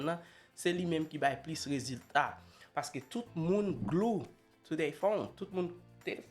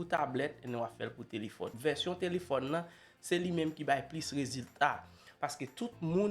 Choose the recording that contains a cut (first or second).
second